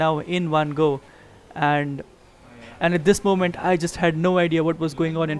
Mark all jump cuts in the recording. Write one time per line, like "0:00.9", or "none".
0:02.6

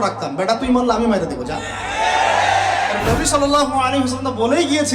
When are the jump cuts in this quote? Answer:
0:03.0

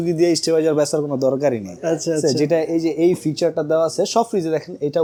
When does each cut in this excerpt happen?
none

